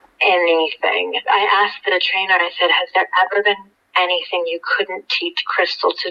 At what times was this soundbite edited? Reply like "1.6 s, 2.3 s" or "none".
1.2 s